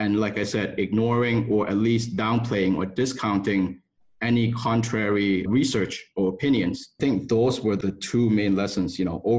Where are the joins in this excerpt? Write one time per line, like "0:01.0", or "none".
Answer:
0:05.5
0:06.9
0:07.8